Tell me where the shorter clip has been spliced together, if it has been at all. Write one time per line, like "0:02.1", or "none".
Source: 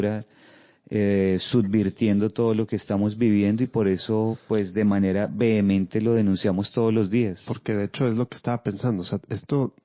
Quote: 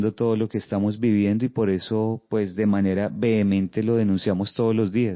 none

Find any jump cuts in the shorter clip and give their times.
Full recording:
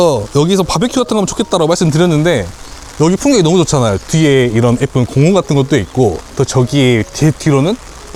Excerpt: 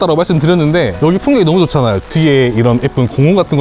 0:00.9

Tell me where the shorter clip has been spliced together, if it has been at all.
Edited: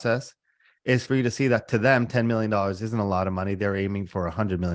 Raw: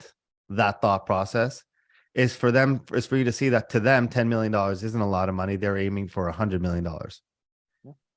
0:01.1

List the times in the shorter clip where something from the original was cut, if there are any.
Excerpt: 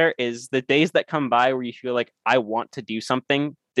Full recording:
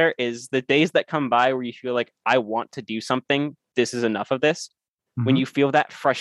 none

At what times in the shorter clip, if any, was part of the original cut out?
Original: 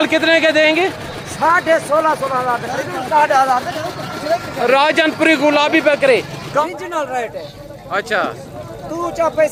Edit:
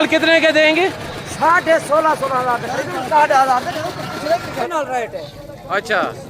0:04.6

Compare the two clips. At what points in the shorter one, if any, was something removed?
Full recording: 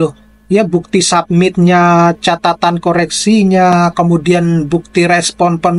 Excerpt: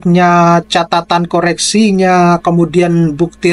none

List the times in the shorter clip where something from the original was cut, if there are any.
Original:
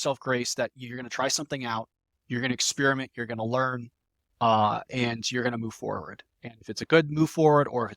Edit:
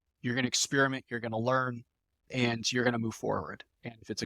0:02.2

